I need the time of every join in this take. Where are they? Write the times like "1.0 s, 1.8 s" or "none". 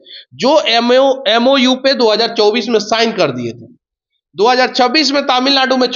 none